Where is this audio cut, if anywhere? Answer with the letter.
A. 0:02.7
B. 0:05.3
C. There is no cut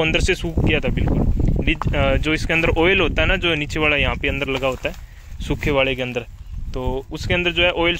C